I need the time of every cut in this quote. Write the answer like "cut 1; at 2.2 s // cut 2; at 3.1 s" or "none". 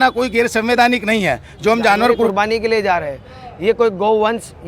cut 1; at 2.3 s